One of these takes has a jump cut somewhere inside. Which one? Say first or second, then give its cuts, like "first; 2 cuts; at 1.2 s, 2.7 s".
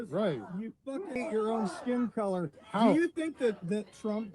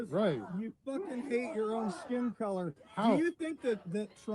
first; 1 cut; at 1.2 s